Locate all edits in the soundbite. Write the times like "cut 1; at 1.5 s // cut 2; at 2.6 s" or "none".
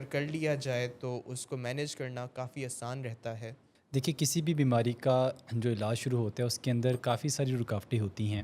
cut 1; at 3.7 s